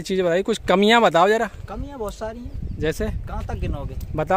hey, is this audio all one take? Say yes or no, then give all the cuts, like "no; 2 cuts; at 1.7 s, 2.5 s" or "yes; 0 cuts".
yes; 0 cuts